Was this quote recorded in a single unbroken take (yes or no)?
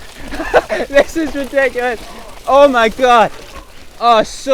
yes